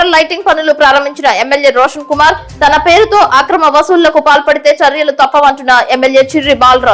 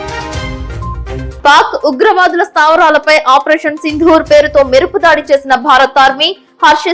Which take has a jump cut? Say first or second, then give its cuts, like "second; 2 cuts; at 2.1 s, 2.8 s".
second; 1 cut; at 1.3 s